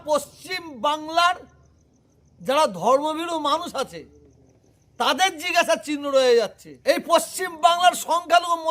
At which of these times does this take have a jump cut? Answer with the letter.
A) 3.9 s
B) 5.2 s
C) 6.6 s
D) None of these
C